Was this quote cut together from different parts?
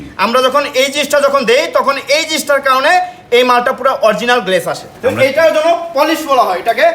yes; 1 cut; at 4.9 s

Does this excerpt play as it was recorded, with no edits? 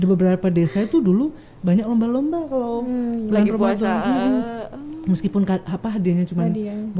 yes; 0 cuts

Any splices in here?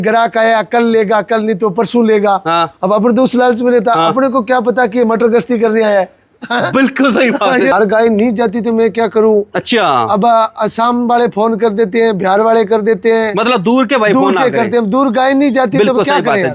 yes; 1 cut; at 7.7 s

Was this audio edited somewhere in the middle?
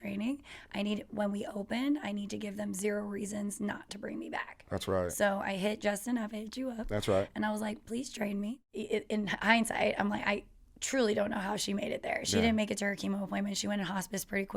yes; 1 cut; at 8.6 s

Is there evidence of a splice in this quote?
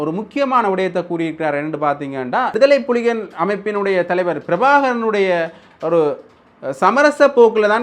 yes; 1 cut; at 2.5 s

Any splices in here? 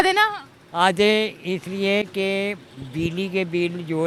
no; 0 cuts

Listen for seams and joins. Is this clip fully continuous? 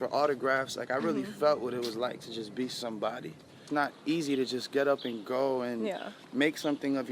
no; 1 cut; at 3.6 s

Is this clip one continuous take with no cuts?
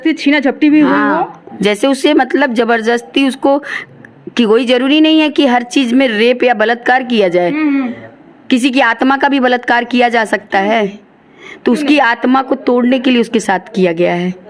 yes; 0 cuts

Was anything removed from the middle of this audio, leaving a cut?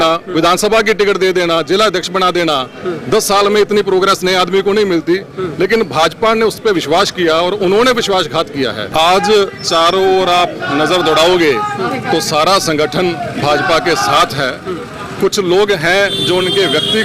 yes; 1 cut; at 8.9 s

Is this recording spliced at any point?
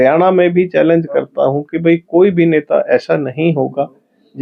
no; 0 cuts

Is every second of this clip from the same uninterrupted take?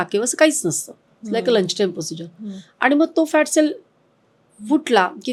yes; 0 cuts

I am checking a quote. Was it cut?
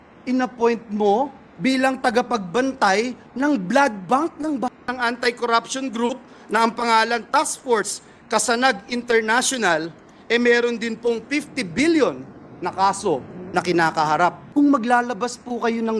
yes; 2 cuts; at 4.9 s, 14.4 s

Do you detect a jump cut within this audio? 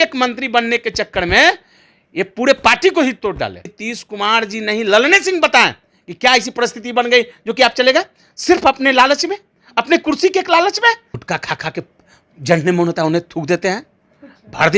yes; 2 cuts; at 3.8 s, 11.1 s

